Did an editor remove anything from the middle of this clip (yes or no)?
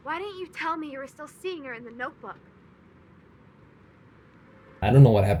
no